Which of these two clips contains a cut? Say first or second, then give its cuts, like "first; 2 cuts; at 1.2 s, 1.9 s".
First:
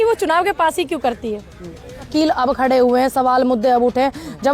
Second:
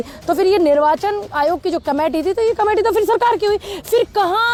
first; 1 cut; at 2.0 s